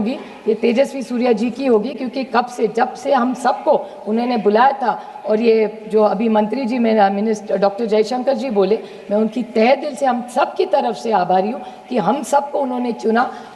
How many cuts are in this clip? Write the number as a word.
zero